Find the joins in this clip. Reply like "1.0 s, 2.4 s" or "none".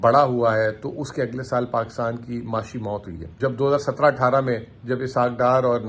3.3 s